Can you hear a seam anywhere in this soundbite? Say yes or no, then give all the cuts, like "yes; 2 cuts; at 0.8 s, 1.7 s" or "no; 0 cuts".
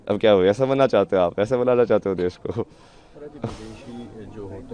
no; 0 cuts